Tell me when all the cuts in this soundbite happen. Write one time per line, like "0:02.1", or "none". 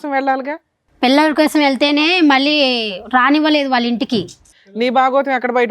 0:04.5

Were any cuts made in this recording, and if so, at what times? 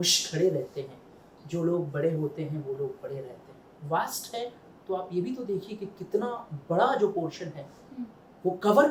none

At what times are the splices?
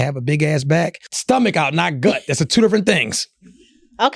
0:01.1

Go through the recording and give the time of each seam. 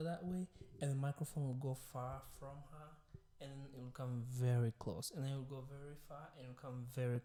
none

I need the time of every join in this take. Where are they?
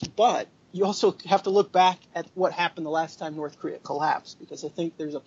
0:02.2

